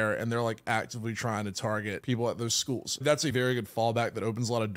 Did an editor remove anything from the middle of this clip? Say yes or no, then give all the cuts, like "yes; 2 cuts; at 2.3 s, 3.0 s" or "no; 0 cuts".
yes; 2 cuts; at 2.0 s, 3.1 s